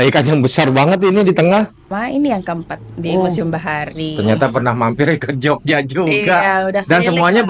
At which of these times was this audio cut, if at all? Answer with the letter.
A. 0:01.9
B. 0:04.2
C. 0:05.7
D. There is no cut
A